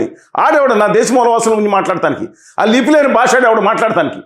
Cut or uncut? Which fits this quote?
uncut